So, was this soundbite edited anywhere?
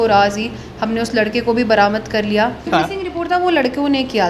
yes; 1 cut; at 2.7 s

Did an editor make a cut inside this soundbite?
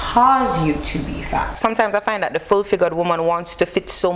yes; 1 cut; at 1.5 s

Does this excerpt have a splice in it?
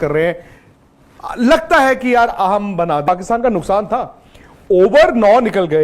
yes; 1 cut; at 3.1 s

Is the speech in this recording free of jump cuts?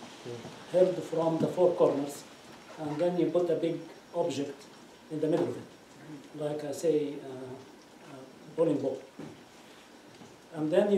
yes; 0 cuts

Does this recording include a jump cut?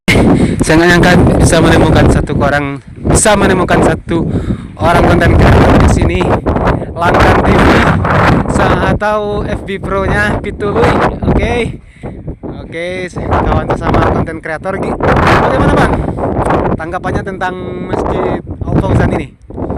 no; 0 cuts

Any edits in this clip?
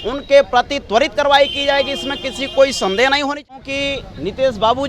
yes; 1 cut; at 3.5 s

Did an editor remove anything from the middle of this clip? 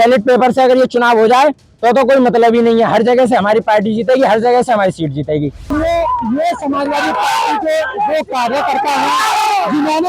yes; 1 cut; at 5.7 s

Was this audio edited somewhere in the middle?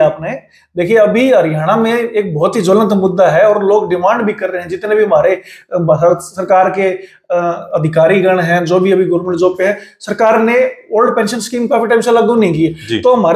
no; 0 cuts

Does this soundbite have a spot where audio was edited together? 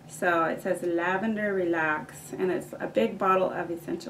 no; 0 cuts

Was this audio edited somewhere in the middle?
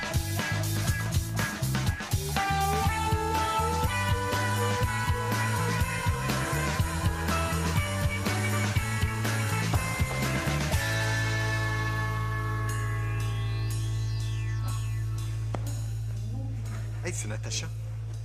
no; 0 cuts

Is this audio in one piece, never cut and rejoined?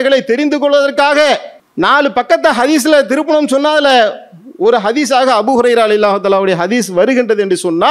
no; 1 cut; at 1.6 s

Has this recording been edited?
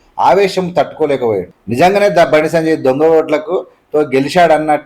yes; 1 cut; at 1.6 s

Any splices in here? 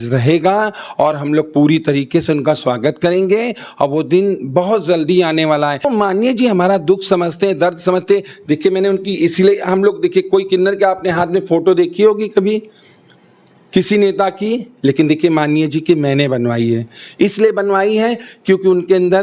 yes; 1 cut; at 5.9 s

